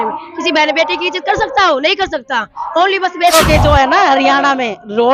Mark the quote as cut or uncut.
cut